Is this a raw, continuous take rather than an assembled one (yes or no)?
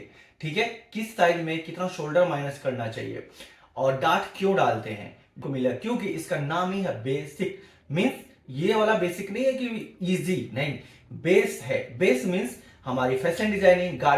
no